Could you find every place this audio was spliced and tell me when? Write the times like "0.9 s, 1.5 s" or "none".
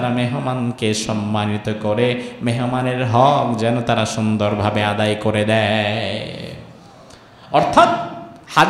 none